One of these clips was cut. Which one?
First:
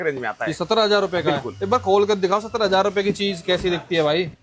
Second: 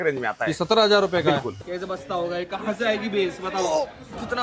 second; 1 cut; at 1.5 s

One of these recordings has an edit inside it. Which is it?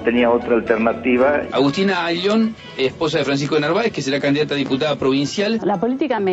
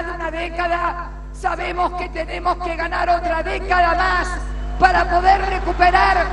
first; 2 cuts; at 1.5 s, 5.6 s

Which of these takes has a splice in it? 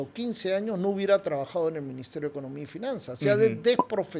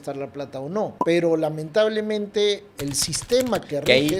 second; 2 cuts; at 1.0 s, 2.7 s

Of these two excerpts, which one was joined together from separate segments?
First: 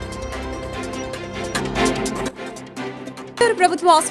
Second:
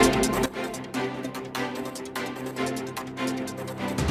first; 1 cut; at 1.5 s

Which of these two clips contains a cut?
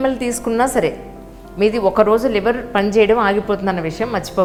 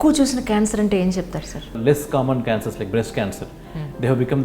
second; 1 cut; at 1.7 s

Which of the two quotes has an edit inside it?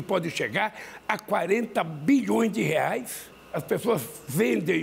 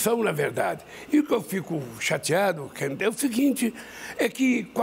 first; 1 cut; at 3.3 s

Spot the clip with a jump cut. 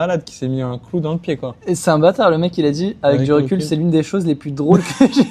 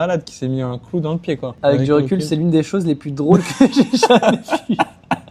second; 1 cut; at 1.5 s

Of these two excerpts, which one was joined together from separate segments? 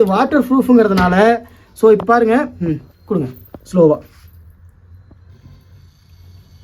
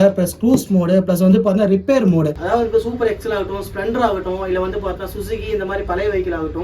second; 1 cut; at 2.4 s

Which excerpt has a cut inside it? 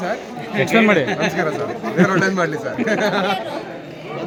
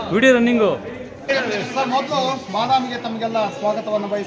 second; 1 cut; at 1.3 s

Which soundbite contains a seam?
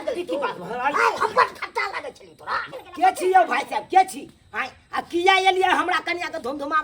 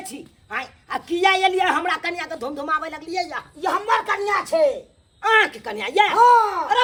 first; 1 cut; at 2.7 s

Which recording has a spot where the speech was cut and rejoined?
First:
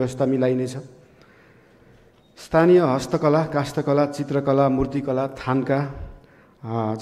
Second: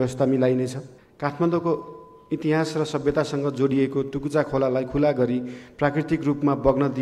second; 1 cut; at 1.1 s

